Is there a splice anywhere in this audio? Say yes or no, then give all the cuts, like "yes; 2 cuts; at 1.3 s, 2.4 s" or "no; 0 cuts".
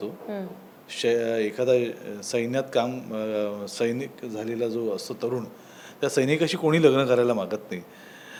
no; 0 cuts